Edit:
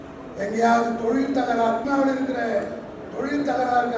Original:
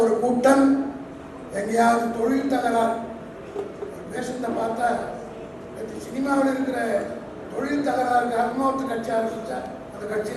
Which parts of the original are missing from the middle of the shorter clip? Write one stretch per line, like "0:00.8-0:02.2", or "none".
0:03.0-0:06.2